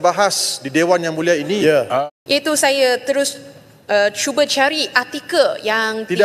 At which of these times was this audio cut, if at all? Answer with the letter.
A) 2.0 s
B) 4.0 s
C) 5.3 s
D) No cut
A